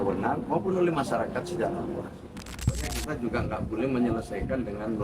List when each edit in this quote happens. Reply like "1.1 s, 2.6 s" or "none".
2.5 s